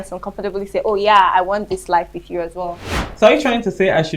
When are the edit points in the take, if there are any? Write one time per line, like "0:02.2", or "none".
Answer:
0:03.0